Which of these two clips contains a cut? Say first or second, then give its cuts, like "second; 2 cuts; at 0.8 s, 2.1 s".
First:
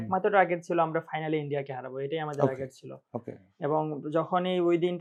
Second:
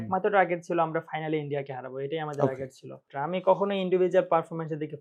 second; 1 cut; at 3.0 s